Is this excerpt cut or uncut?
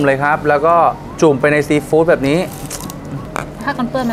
cut